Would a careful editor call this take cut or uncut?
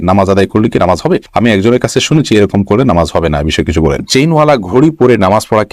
cut